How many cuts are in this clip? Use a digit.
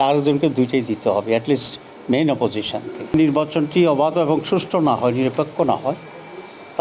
1